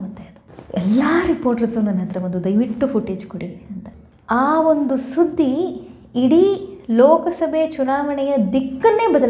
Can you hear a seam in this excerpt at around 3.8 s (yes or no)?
yes